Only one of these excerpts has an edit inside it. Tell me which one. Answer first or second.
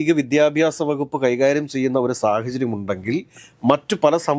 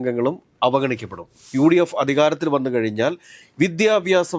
second